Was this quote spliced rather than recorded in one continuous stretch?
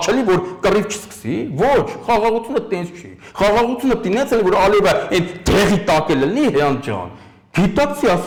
no; 0 cuts

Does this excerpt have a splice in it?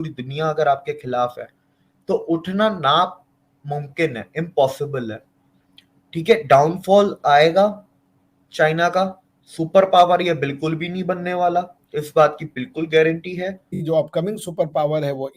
yes; 1 cut; at 13.7 s

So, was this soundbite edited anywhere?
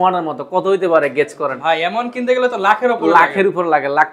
no; 0 cuts

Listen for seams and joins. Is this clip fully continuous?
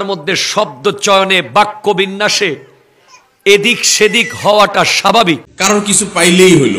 no; 1 cut; at 5.5 s

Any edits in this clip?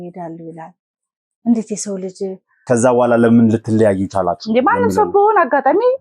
yes; 1 cut; at 2.6 s

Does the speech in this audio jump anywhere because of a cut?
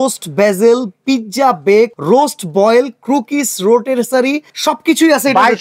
yes; 2 cuts; at 2.0 s, 4.5 s

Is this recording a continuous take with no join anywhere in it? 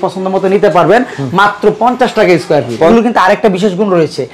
no; 1 cut; at 2.9 s

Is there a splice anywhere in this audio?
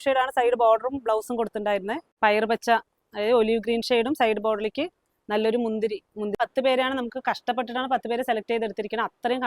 yes; 2 cuts; at 2.1 s, 6.4 s

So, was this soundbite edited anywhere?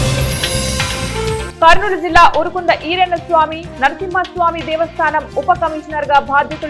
no; 0 cuts

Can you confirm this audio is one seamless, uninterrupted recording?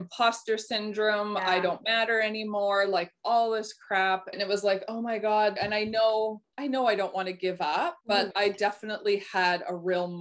no; 4 cuts; at 4.4 s, 5.5 s, 6.5 s, 8.3 s

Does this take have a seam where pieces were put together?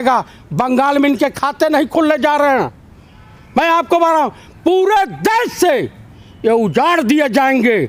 no; 0 cuts

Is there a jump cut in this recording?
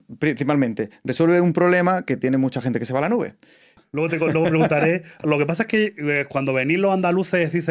yes; 1 cut; at 3.8 s

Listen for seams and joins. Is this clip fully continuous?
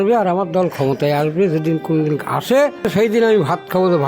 no; 1 cut; at 2.9 s

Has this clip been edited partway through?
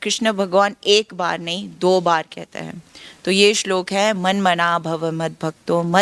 no; 0 cuts

